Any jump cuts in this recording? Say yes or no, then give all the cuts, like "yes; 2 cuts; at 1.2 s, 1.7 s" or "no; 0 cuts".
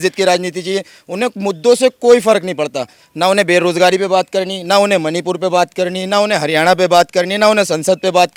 no; 0 cuts